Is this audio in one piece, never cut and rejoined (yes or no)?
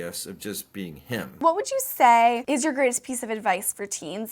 no